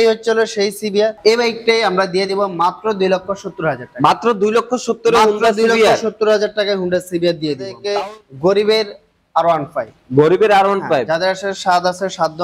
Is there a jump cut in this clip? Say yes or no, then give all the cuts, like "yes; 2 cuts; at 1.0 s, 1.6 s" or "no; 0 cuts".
yes; 2 cuts; at 1.2 s, 7.8 s